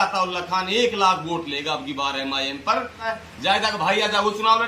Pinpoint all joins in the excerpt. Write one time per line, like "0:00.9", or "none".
0:03.0